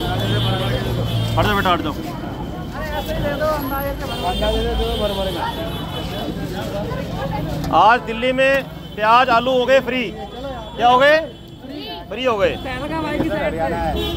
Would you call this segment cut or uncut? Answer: uncut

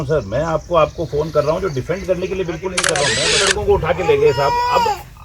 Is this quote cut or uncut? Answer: cut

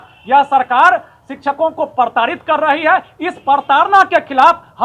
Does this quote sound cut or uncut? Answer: uncut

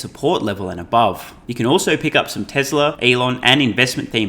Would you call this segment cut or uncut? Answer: cut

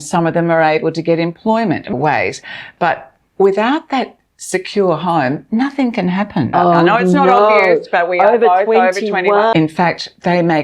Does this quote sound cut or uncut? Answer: cut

